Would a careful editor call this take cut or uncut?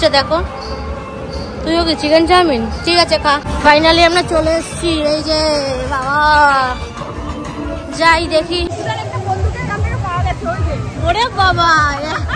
cut